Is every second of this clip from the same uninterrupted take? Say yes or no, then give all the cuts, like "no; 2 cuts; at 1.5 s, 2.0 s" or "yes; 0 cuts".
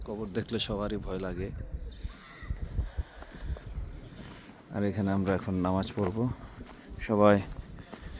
yes; 0 cuts